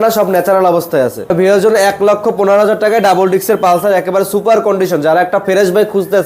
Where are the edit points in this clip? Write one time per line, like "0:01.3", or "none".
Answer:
0:01.3

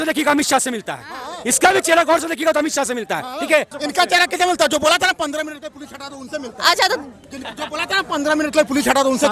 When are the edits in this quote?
0:03.7

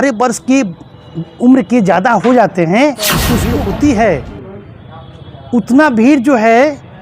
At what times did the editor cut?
0:03.5

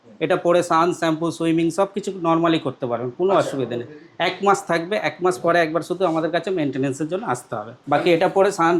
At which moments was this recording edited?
0:07.7

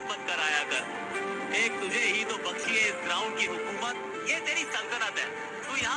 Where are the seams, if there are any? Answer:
none

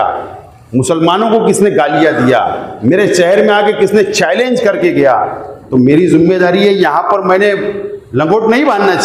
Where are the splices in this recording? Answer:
none

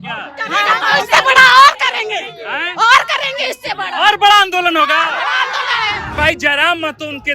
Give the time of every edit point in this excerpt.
0:06.1

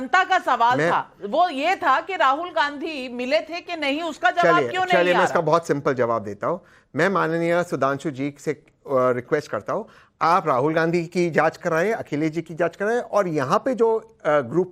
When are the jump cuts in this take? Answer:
0:13.3

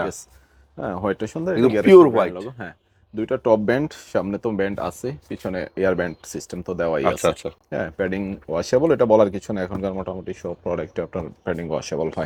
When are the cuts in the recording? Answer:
none

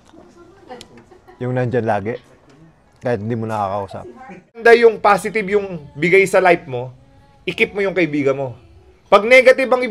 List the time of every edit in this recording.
0:04.6

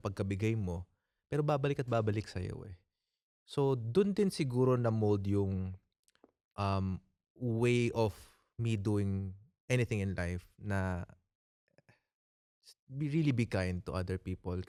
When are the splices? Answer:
none

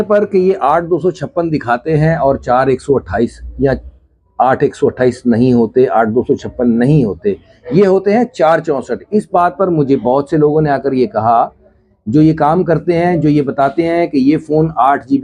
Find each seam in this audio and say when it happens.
none

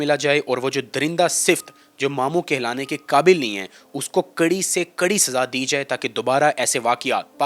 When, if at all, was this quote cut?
none

